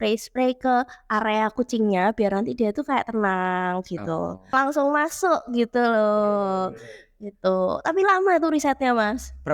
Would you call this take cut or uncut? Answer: cut